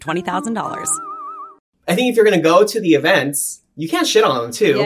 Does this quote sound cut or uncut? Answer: cut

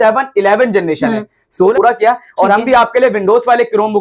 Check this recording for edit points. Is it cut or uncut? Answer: cut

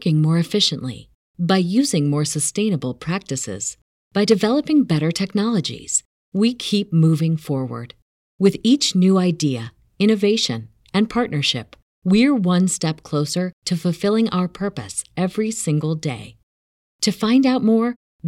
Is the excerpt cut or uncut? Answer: uncut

